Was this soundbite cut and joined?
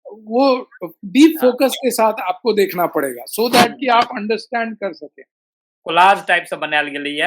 yes; 1 cut; at 5.6 s

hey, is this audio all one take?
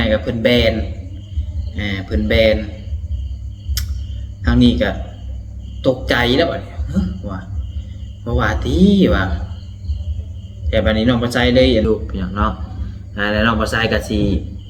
no; 1 cut; at 11.9 s

